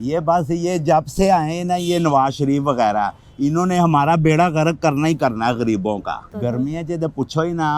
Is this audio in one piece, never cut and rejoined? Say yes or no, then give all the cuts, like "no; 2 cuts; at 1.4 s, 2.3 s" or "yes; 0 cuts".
no; 1 cut; at 6.3 s